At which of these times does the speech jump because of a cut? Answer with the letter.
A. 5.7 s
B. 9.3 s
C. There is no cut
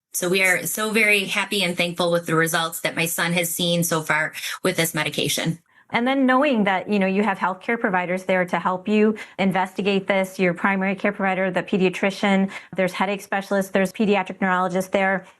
A